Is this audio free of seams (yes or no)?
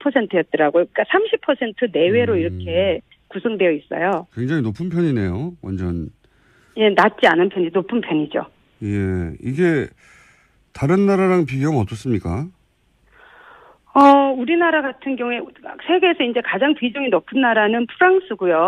yes